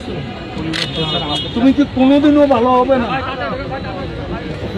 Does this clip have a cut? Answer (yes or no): no